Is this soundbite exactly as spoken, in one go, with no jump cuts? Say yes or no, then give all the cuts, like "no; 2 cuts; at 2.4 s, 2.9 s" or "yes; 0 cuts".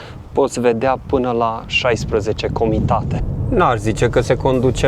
no; 1 cut; at 3.2 s